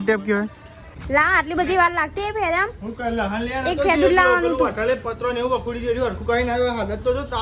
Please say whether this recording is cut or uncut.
cut